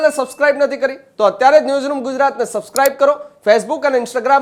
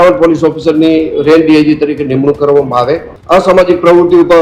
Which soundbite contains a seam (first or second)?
second